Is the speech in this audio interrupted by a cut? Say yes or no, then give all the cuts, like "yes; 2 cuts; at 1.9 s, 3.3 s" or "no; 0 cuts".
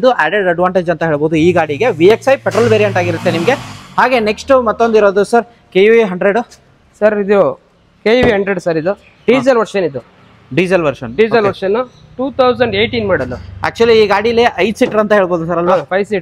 no; 0 cuts